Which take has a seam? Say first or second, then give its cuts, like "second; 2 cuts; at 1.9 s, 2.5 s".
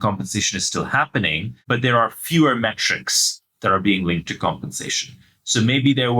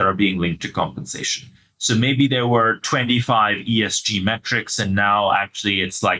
first; 1 cut; at 1.5 s